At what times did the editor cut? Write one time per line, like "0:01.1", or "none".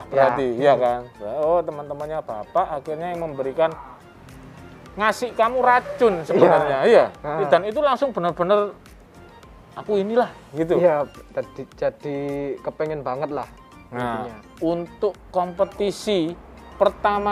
none

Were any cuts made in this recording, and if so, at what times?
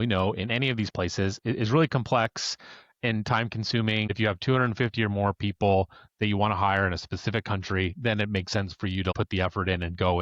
0:04.1
0:09.1

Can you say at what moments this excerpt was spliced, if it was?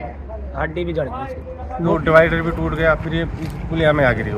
0:01.9

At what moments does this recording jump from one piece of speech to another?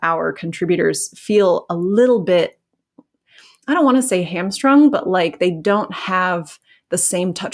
none

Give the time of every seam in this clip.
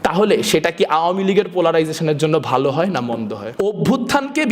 0:03.4

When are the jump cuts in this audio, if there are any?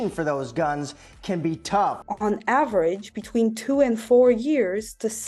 0:02.0

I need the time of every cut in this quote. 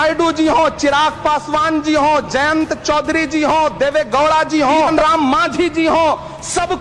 0:04.9

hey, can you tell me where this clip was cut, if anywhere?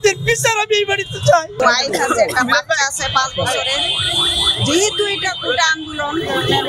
0:01.6

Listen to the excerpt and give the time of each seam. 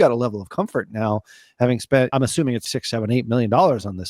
0:02.7

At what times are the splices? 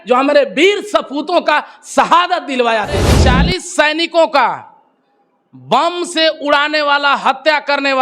0:03.1

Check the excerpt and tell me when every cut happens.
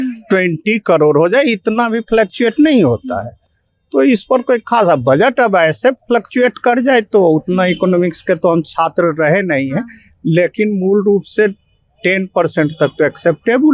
none

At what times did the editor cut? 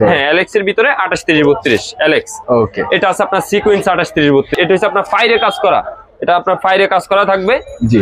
0:04.5

